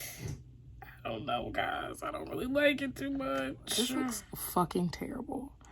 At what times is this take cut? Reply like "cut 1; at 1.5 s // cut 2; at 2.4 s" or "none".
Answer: cut 1; at 3.9 s